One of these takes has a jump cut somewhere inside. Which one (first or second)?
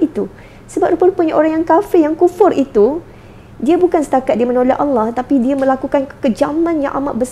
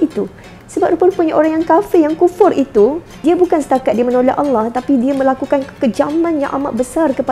second